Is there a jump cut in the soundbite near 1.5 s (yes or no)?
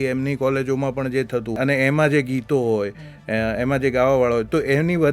yes